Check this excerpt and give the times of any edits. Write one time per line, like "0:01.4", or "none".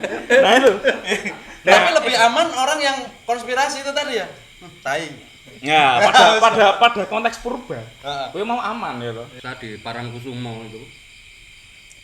0:09.3